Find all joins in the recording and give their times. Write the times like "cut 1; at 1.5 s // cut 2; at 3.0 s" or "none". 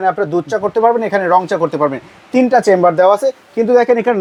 none